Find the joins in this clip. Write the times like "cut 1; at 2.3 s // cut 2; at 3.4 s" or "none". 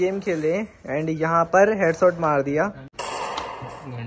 cut 1; at 2.9 s